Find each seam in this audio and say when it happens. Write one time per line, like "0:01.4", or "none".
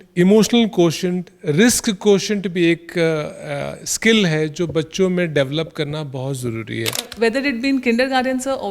0:07.1